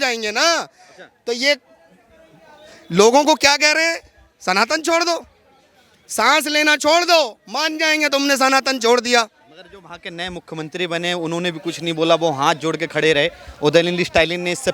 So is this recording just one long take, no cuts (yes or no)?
yes